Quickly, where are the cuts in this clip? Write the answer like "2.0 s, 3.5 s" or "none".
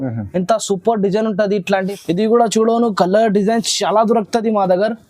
1.9 s